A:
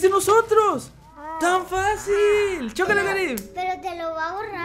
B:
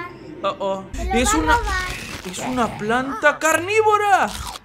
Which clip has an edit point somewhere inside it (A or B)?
B